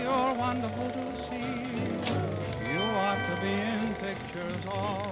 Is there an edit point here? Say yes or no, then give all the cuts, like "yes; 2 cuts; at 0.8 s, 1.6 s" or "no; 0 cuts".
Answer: no; 0 cuts